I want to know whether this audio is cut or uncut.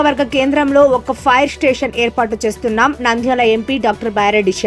uncut